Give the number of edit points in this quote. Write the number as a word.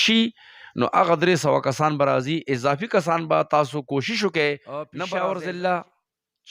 one